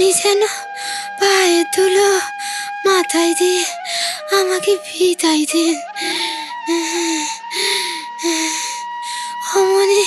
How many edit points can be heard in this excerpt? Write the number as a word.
zero